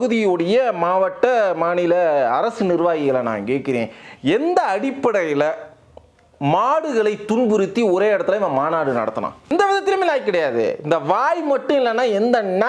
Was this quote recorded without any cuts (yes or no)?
no